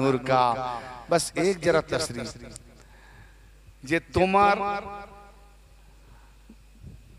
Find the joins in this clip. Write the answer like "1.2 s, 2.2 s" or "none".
none

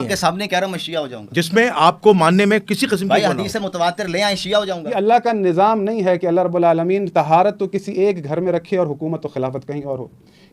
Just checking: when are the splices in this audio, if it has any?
4.8 s

